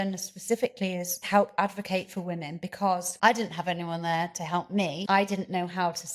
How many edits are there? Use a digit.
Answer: 3